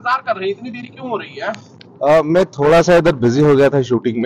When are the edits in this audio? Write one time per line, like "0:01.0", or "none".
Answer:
none